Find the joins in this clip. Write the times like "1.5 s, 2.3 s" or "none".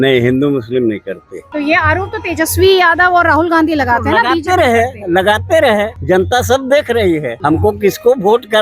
1.5 s, 5.9 s, 7.3 s